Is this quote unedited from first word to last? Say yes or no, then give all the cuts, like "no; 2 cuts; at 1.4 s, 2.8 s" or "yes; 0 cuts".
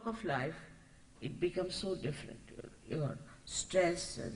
no; 1 cut; at 2.5 s